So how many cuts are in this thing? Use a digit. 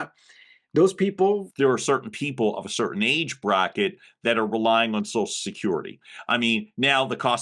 1